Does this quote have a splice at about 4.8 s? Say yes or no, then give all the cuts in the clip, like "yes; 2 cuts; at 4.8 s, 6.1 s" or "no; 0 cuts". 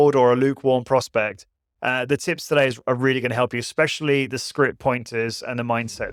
no; 0 cuts